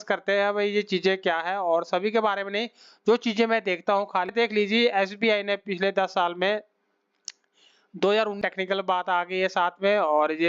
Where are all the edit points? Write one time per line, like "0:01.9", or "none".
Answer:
0:04.3
0:08.4